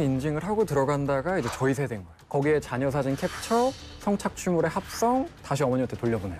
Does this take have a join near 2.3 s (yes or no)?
yes